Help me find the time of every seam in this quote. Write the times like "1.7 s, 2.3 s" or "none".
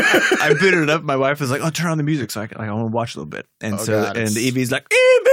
none